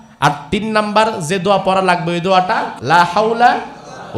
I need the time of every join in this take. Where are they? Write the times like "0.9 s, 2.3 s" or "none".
2.7 s